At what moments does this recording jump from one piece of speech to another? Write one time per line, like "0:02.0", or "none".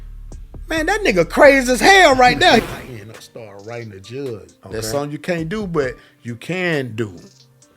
0:02.6